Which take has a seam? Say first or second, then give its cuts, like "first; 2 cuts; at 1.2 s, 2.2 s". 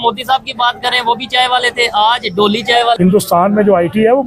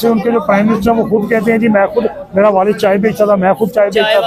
first; 1 cut; at 3.0 s